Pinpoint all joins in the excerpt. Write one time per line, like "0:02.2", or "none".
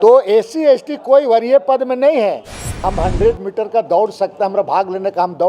0:02.8